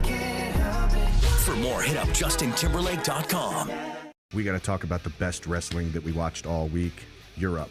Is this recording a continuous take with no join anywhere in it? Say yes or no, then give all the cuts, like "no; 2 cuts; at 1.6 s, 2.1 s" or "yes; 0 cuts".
no; 1 cut; at 4.2 s